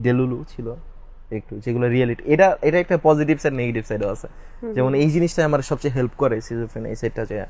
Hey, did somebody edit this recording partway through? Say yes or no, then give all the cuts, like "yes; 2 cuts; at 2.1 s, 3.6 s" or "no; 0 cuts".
no; 0 cuts